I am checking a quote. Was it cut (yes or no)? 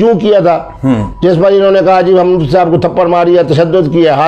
no